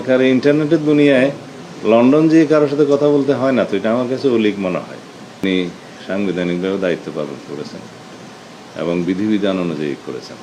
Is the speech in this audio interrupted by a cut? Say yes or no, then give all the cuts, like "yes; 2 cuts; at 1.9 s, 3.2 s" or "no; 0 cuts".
yes; 1 cut; at 5.4 s